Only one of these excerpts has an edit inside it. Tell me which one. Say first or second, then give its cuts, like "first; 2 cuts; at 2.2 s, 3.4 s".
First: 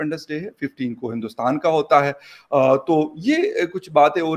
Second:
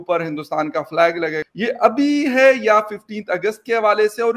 second; 1 cut; at 1.5 s